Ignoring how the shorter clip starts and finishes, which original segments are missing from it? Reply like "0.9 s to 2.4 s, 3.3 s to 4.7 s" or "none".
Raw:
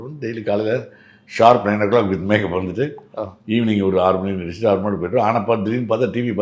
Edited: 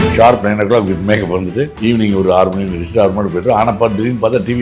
3.0 s to 3.4 s